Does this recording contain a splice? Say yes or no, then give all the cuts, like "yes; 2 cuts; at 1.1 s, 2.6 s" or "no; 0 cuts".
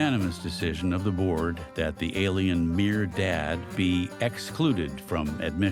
no; 0 cuts